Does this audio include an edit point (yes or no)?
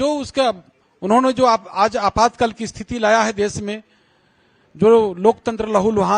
no